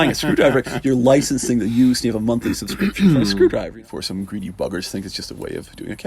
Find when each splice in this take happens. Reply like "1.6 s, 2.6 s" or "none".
3.7 s